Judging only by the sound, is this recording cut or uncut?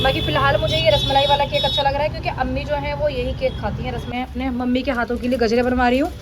cut